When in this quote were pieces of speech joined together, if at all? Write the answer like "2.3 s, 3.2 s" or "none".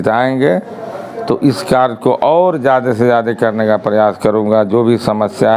none